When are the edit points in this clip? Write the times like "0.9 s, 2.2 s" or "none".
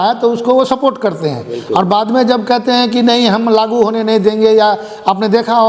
none